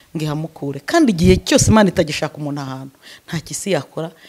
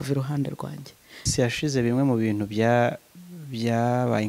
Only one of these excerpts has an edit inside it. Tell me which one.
second; 1 cut; at 1.3 s

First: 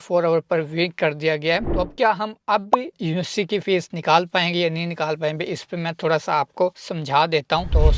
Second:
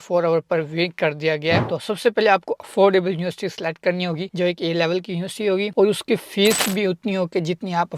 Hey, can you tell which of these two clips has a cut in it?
second; 1 cut; at 1.6 s

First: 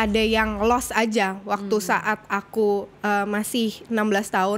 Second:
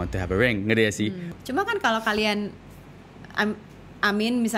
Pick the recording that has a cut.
second; 1 cut; at 1.3 s

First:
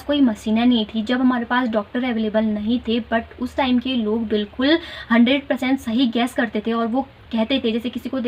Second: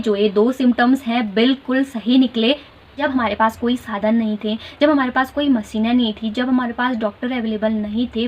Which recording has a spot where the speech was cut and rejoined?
second; 1 cut; at 2.9 s

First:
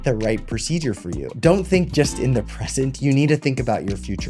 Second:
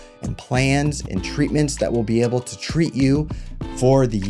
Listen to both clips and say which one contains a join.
first; 1 cut; at 1.3 s

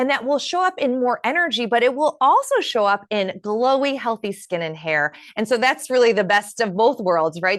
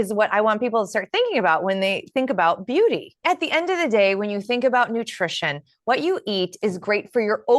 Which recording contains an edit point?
second; 1 cut; at 3.1 s

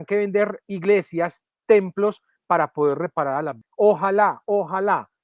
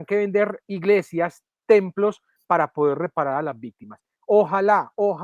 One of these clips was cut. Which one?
first; 1 cut; at 3.6 s

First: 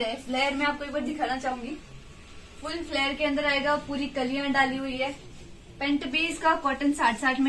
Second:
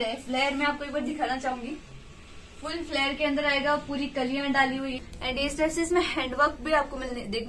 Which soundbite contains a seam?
second; 1 cut; at 4.9 s

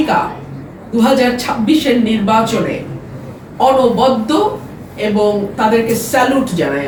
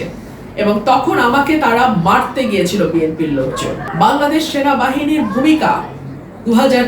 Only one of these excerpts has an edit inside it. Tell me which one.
second; 1 cut; at 3.8 s

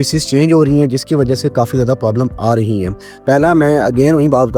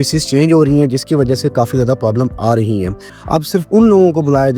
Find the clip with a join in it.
second; 1 cut; at 3.1 s

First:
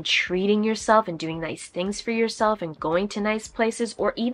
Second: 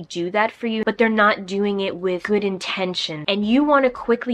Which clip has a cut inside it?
second; 2 cuts; at 0.8 s, 3.1 s

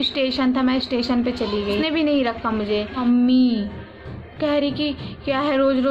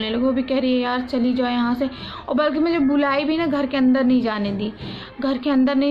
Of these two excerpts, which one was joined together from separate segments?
first; 2 cuts; at 1.8 s, 3.0 s

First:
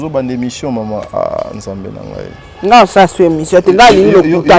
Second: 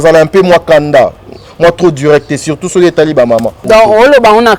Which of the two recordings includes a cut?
second; 1 cut; at 3.6 s

